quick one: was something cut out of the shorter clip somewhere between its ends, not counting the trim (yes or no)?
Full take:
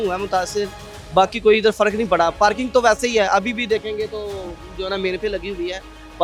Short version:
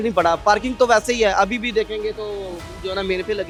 no